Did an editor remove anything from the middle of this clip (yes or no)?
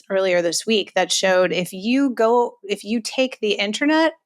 no